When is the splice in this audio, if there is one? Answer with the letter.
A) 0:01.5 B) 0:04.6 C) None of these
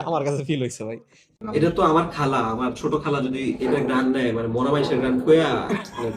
A